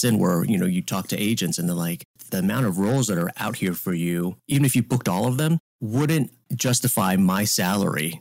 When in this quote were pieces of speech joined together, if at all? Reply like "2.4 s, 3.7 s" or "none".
2.2 s, 3.3 s, 4.4 s, 5.7 s, 6.4 s